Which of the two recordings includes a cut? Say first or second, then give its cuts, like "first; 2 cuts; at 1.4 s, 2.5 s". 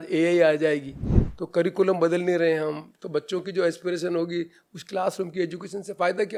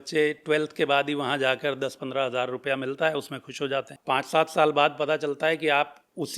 second; 1 cut; at 3.9 s